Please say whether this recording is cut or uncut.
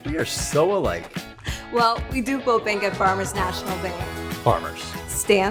uncut